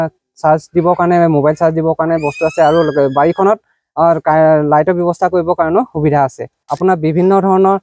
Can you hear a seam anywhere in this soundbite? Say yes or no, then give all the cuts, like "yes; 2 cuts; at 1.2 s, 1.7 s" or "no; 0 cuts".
yes; 1 cut; at 6.6 s